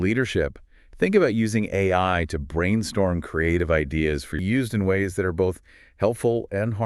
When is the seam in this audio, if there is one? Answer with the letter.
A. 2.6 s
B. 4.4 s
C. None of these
B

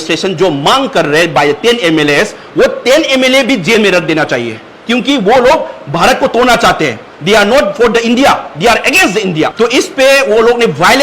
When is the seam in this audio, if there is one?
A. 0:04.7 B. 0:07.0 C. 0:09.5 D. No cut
C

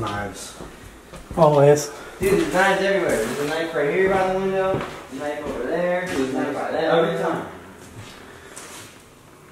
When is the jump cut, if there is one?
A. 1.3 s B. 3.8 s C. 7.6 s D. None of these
D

